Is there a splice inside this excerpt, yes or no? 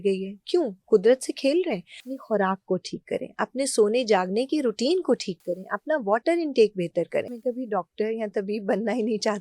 yes